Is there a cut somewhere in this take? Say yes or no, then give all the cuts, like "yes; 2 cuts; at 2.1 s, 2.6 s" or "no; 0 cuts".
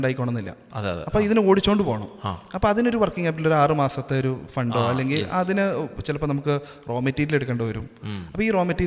no; 0 cuts